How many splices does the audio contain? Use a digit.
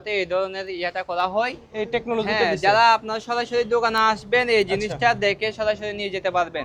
0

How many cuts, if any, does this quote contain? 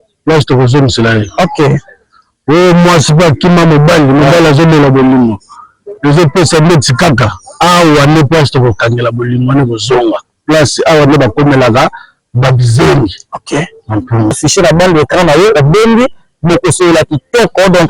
1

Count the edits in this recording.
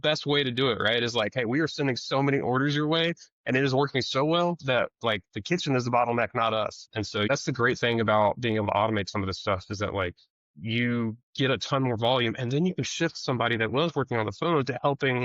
1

